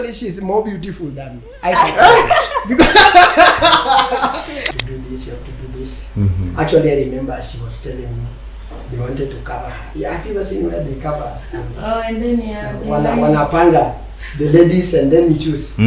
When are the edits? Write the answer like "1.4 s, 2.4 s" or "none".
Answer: 4.6 s